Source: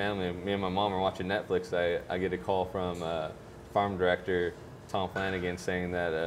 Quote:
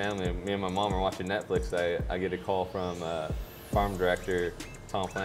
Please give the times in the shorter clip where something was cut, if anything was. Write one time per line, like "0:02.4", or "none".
none